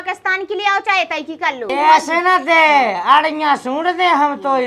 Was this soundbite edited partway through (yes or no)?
yes